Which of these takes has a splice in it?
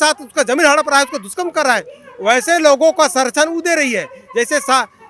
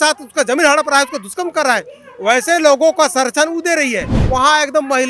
second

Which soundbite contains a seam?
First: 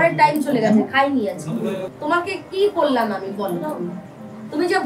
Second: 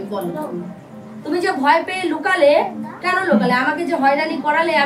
first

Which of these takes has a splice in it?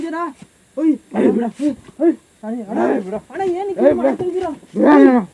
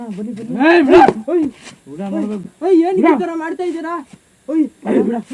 second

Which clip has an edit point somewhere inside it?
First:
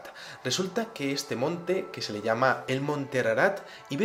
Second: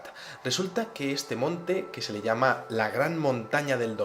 second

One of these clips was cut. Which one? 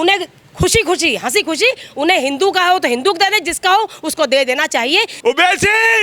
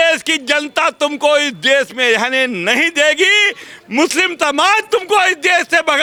first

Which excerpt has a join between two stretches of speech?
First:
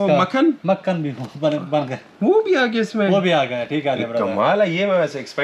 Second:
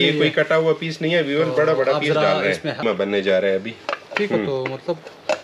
second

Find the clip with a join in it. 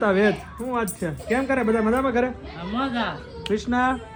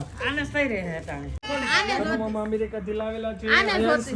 second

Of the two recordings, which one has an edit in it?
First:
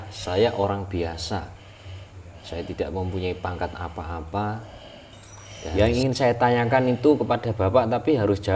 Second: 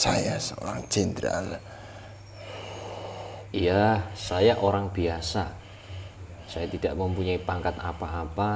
first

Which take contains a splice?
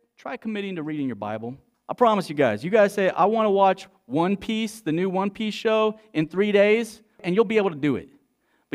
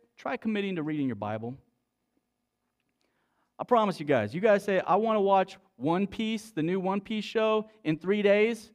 first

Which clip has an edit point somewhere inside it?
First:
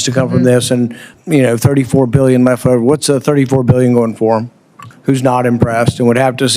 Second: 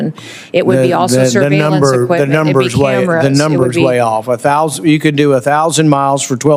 first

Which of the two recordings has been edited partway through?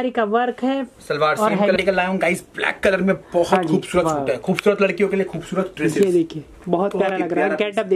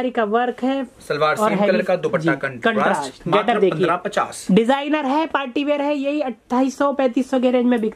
first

